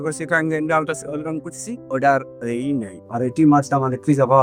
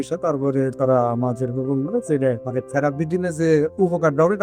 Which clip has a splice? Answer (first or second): second